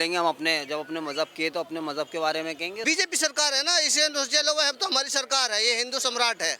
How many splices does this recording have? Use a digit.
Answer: 1